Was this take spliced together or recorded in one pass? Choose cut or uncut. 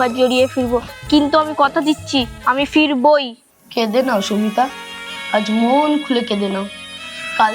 cut